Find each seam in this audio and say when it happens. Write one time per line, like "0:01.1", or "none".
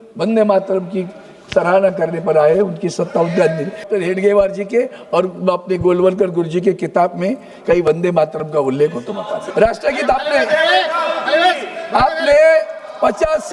0:03.8
0:09.4